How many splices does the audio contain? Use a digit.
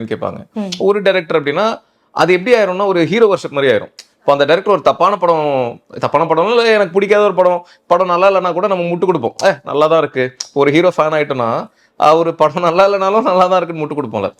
0